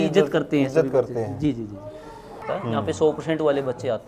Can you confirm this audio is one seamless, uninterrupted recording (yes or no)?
no